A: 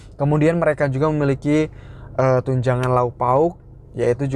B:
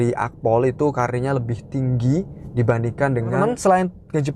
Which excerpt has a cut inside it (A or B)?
B